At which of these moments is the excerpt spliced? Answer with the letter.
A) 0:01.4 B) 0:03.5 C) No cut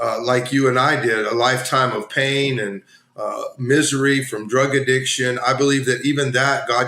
C